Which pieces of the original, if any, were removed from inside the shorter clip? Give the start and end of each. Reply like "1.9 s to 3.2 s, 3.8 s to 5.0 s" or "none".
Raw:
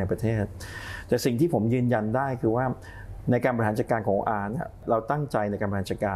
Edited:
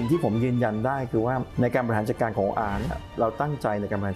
2.8 s to 3.2 s

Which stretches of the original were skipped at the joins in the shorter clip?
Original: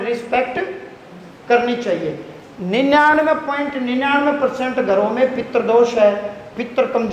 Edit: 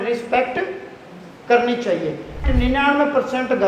2.4 s to 3.7 s

